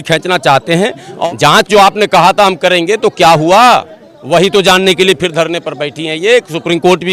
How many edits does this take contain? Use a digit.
1